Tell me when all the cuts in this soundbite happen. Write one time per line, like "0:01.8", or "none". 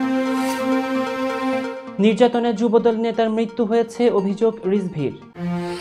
none